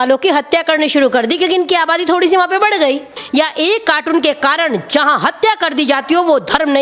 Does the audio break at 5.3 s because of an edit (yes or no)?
no